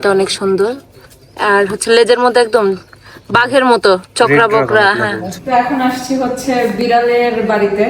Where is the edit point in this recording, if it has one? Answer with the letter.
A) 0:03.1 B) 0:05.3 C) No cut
B